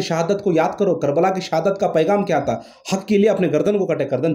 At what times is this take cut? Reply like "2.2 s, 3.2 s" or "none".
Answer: none